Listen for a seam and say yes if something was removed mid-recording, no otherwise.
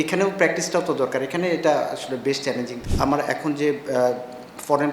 yes